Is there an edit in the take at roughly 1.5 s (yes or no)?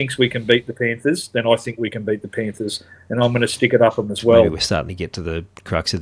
no